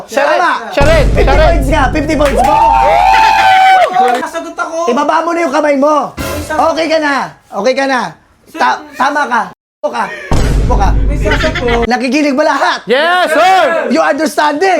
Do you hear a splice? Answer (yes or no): yes